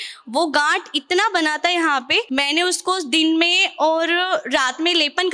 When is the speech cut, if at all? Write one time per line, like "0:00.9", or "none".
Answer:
0:02.3